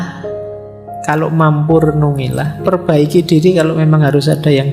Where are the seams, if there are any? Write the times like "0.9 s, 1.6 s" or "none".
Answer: 2.6 s